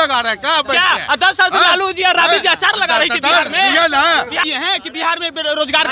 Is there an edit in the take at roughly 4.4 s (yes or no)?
yes